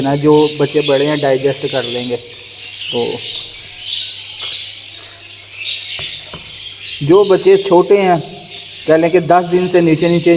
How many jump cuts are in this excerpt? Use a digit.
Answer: 0